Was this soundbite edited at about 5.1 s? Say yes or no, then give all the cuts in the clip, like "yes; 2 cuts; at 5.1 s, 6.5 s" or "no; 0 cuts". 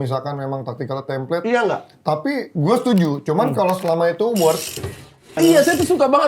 yes; 1 cut; at 5.1 s